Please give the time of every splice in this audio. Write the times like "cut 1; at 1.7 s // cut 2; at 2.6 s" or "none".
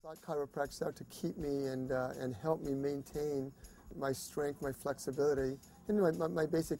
cut 1; at 3.9 s

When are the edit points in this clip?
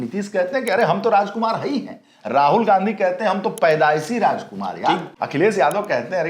cut 1; at 5.1 s

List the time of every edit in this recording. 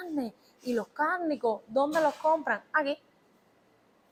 none

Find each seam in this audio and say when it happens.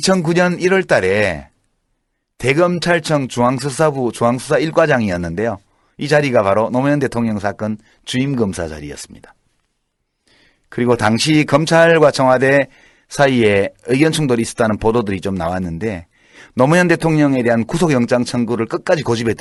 none

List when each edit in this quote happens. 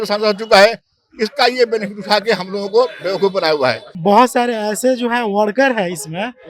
cut 1; at 3.9 s

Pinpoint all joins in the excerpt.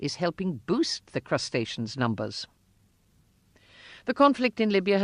cut 1; at 1.0 s

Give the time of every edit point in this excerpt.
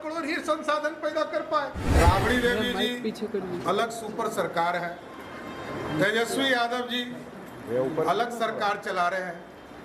cut 1; at 1.8 s

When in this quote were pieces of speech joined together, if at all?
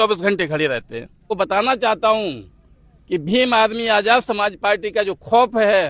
cut 1; at 1.3 s

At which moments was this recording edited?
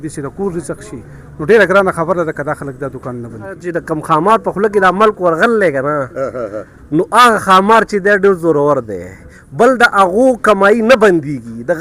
cut 1; at 3.6 s

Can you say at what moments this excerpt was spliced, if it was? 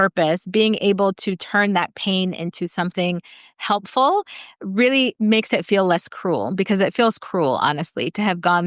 cut 1; at 5.1 s

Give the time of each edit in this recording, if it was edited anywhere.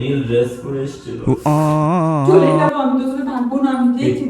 cut 1; at 1.1 s // cut 2; at 2.2 s

